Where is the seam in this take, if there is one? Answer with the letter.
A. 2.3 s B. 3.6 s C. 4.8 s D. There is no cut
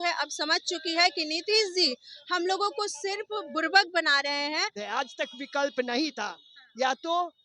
C